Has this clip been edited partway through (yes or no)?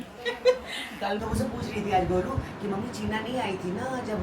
yes